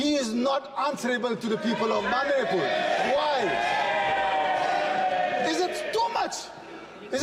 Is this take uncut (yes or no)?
yes